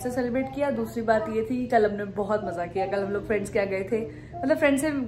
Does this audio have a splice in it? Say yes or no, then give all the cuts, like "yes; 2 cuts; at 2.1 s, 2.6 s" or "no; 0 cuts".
no; 0 cuts